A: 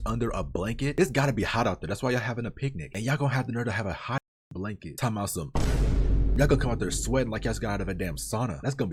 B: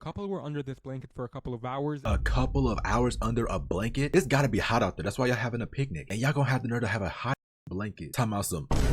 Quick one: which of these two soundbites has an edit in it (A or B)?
B